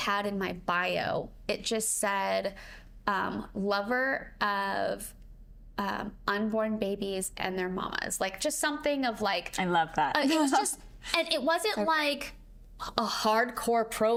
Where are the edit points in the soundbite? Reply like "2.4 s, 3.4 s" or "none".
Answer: none